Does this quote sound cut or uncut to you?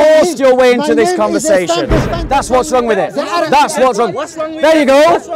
cut